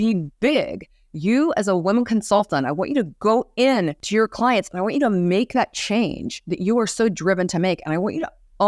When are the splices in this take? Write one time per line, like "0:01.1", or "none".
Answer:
0:04.0